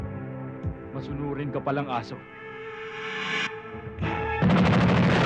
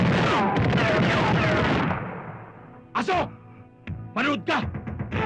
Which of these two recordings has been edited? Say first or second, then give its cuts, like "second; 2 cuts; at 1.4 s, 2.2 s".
first; 2 cuts; at 2.4 s, 3.9 s